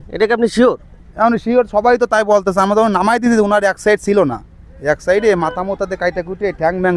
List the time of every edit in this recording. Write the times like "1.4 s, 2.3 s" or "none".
none